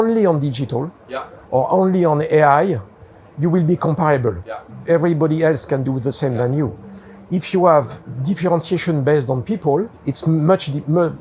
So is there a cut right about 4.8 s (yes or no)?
yes